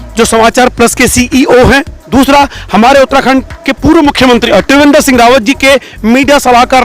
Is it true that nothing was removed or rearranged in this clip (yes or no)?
no